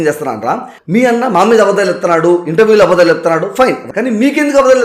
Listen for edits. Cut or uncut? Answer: cut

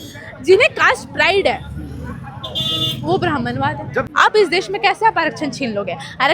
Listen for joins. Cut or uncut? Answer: cut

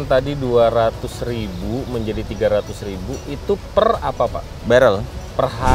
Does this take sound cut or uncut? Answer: cut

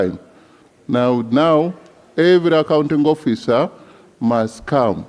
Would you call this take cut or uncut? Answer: uncut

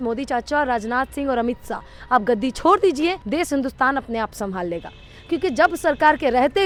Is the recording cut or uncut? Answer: uncut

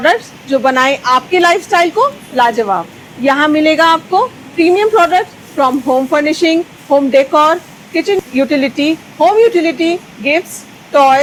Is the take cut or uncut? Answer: uncut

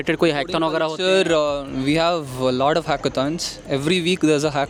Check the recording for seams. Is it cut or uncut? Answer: uncut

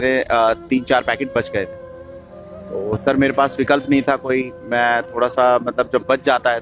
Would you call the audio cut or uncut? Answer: uncut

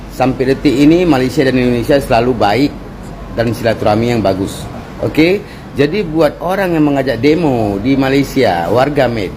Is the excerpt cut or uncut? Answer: uncut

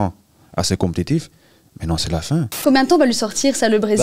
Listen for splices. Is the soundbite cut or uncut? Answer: cut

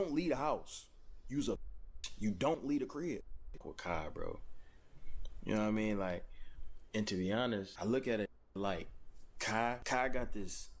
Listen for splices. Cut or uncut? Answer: cut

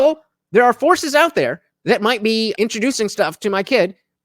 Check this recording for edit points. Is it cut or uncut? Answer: cut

